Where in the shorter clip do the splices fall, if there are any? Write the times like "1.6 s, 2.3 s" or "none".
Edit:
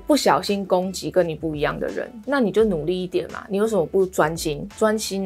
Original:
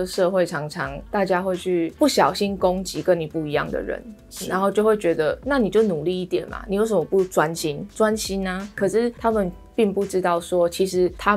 2.2 s